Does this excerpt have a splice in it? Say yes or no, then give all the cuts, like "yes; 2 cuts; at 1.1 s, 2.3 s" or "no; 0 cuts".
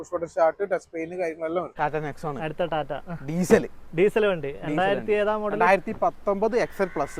yes; 1 cut; at 1.7 s